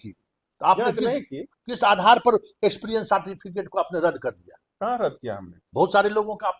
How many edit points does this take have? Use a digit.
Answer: 0